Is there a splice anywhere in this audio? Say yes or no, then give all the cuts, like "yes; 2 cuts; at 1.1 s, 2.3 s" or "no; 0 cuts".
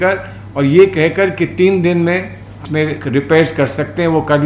yes; 1 cut; at 2.6 s